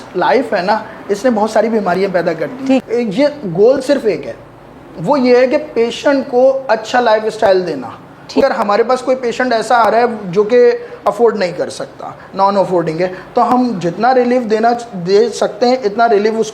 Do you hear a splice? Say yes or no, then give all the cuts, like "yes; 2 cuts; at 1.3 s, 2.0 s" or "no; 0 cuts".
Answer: yes; 2 cuts; at 2.8 s, 8.4 s